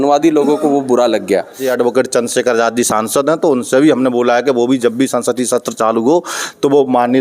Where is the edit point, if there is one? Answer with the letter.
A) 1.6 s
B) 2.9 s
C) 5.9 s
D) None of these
A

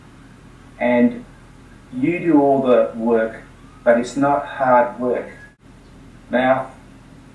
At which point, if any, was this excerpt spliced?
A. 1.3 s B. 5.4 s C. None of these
B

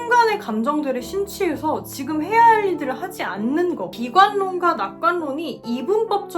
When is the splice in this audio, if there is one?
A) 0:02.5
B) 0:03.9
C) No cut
B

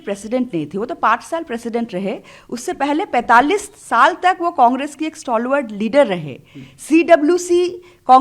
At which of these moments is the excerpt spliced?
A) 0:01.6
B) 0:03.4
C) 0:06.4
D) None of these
D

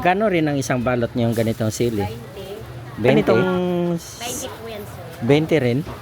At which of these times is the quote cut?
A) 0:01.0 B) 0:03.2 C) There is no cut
B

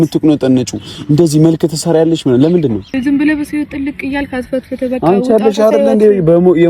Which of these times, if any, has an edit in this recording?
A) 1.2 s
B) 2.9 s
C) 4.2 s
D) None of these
B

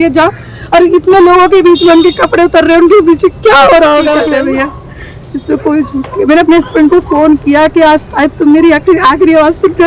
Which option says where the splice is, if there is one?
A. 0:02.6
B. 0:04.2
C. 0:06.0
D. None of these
B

